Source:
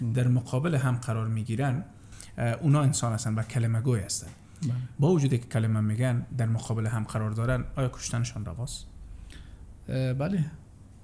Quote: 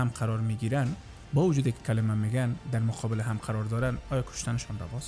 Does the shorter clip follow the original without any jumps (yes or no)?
no